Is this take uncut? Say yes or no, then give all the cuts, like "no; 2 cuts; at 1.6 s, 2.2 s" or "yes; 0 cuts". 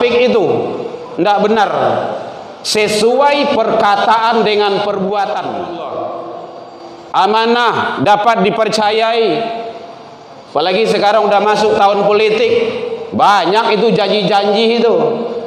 no; 1 cut; at 5.6 s